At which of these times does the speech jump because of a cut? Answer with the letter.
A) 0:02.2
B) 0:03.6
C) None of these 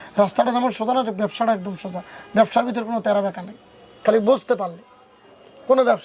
C